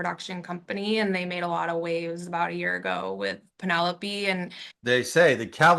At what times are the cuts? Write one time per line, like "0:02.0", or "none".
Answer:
0:04.6